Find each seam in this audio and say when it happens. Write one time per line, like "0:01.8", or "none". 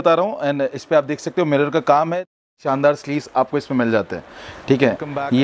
0:02.3